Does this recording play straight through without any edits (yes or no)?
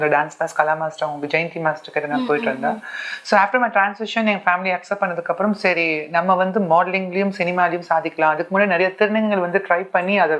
yes